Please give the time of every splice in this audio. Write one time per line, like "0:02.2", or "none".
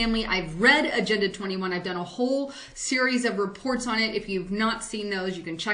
0:02.8